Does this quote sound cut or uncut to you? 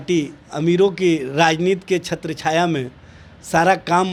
uncut